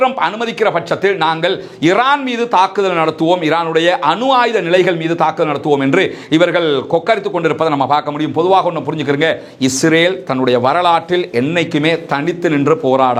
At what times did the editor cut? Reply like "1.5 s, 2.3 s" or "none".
none